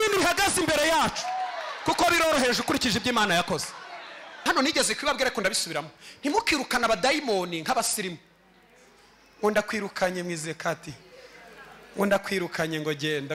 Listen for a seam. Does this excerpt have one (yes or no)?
yes